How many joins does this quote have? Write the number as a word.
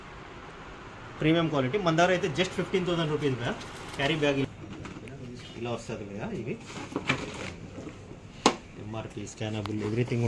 one